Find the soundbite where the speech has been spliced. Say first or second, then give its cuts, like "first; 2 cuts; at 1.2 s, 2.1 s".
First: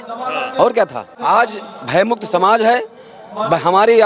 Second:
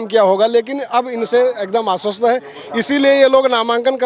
first; 1 cut; at 1.1 s